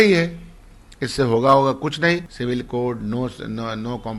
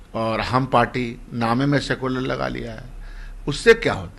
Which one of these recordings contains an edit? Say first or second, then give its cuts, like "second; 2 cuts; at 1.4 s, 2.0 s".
first; 1 cut; at 2.3 s